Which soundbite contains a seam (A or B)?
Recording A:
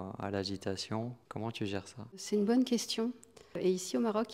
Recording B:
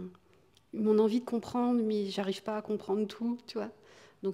A